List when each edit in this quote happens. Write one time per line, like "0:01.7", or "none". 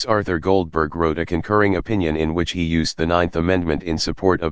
none

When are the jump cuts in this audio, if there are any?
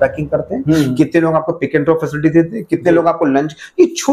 none

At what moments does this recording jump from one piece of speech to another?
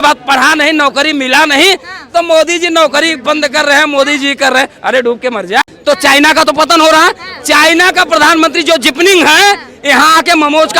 0:05.6

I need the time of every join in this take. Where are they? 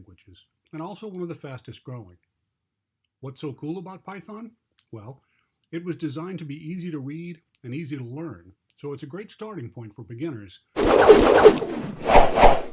0:10.6

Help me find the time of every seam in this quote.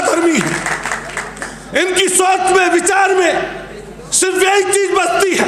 none

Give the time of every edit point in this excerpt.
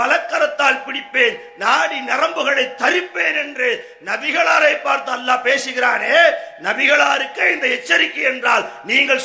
none

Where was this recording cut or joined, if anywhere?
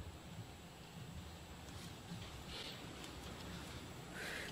none

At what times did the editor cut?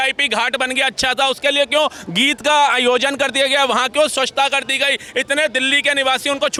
none

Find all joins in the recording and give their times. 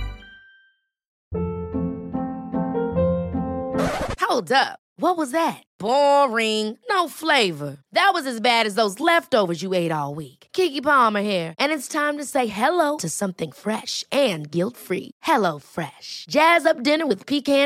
0:01.2

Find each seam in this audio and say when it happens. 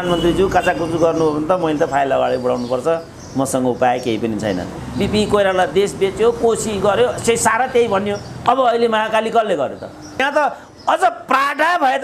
0:04.8
0:10.2

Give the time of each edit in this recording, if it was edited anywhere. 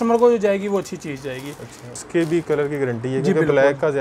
0:02.0

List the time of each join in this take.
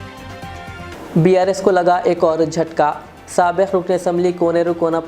0:00.9

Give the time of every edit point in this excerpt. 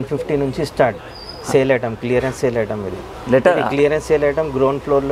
none

